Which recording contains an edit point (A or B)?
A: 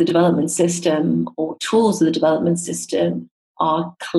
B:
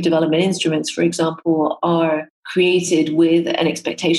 B